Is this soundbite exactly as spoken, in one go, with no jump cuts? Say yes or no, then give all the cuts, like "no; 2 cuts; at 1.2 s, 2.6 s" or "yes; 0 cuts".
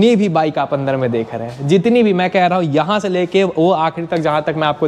yes; 0 cuts